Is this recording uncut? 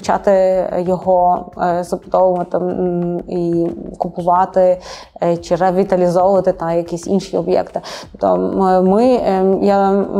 yes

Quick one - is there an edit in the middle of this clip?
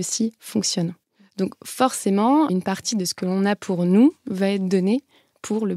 yes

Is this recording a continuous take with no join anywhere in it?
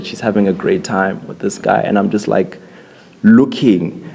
yes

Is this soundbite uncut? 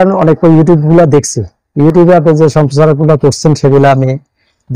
yes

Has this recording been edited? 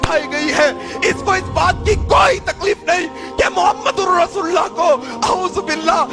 no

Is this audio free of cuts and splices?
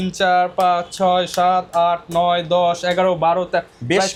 yes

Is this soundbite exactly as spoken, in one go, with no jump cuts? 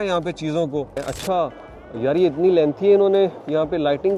no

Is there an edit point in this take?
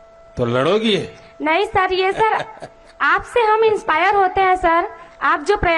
no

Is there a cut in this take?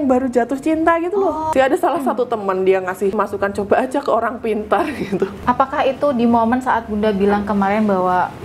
yes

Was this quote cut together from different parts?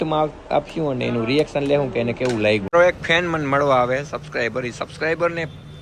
yes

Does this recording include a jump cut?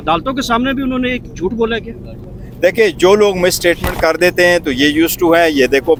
no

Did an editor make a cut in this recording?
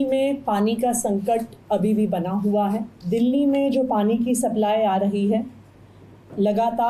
yes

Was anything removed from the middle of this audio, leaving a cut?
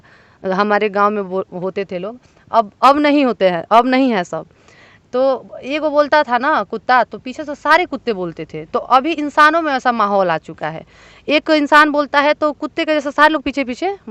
no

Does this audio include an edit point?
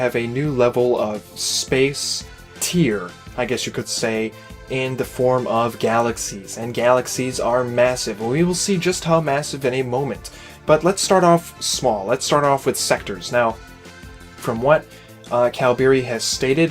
yes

